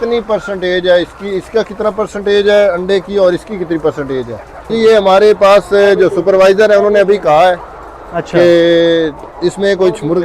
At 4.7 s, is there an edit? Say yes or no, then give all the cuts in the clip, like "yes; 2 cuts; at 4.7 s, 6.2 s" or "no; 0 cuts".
yes; 1 cut; at 4.7 s